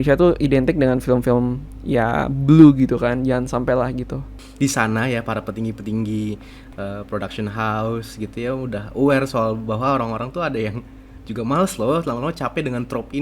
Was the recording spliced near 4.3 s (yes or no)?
yes